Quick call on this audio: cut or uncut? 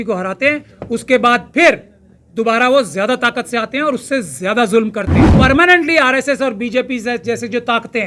cut